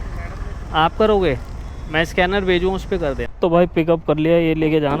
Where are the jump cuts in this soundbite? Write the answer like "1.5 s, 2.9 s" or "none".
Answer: 3.3 s